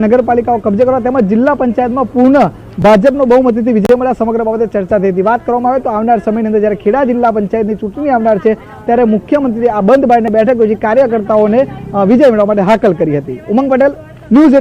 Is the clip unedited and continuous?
no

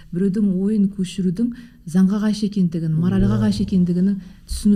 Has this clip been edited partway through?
no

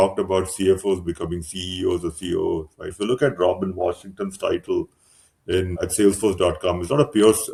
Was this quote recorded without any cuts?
yes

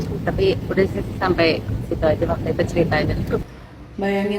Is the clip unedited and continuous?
no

